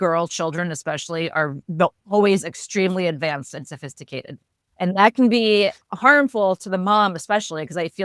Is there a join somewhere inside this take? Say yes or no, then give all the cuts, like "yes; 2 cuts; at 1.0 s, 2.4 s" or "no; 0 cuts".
no; 0 cuts